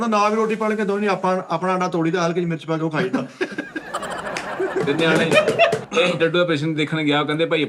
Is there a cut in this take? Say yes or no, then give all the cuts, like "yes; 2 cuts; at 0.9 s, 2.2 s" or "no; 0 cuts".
yes; 1 cut; at 5.9 s